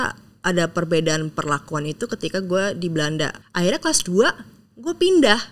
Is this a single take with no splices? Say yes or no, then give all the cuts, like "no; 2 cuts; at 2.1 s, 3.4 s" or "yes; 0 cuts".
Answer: no; 1 cut; at 3.4 s